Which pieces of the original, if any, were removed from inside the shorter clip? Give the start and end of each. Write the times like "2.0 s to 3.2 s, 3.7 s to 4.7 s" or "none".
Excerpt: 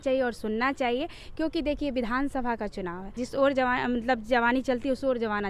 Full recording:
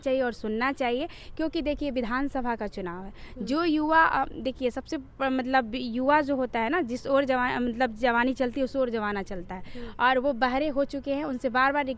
3.2 s to 6.9 s